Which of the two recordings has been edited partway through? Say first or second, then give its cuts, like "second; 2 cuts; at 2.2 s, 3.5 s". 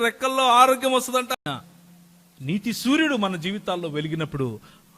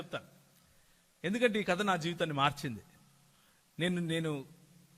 first; 1 cut; at 1.4 s